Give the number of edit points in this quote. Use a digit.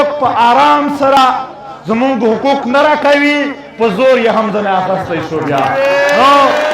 1